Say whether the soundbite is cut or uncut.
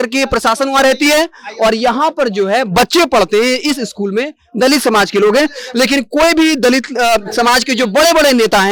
uncut